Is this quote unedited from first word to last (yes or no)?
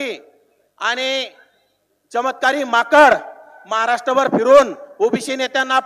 yes